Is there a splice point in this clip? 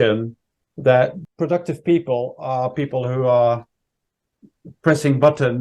yes; 1 cut; at 1.2 s

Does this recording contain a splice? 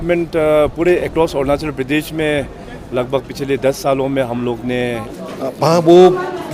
yes; 1 cut; at 5.2 s

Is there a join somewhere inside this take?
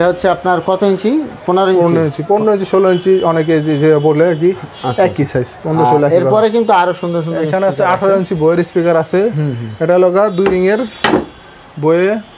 no; 0 cuts

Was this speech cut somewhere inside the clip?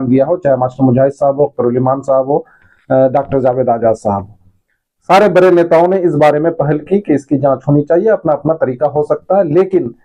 no; 0 cuts

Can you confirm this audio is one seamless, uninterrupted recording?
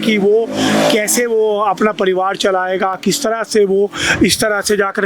yes; 0 cuts

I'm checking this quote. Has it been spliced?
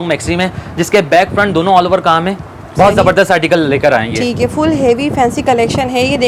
no; 0 cuts

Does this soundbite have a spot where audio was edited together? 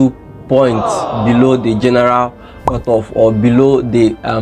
no; 0 cuts

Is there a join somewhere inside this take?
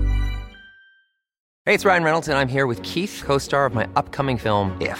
yes; 1 cut; at 1.5 s

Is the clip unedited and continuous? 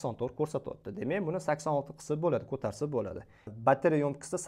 no; 1 cut; at 3.4 s

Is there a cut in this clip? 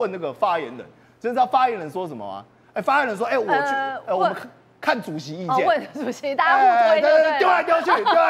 no; 0 cuts

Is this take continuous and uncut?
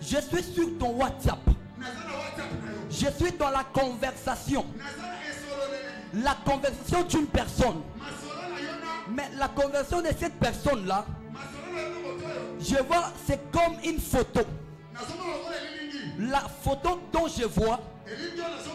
yes; 0 cuts

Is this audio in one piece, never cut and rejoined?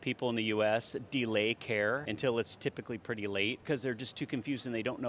no; 2 cuts; at 2.1 s, 3.6 s

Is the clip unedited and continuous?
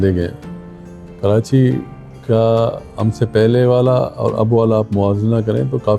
yes; 0 cuts

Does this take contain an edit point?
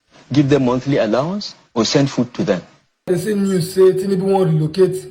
yes; 1 cut; at 3.0 s

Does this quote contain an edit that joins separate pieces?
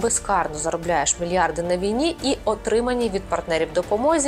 no; 0 cuts

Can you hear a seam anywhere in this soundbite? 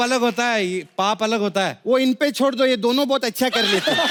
no; 0 cuts

